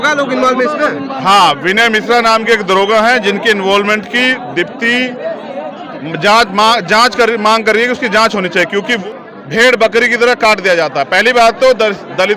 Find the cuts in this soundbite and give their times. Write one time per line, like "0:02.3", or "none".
0:08.9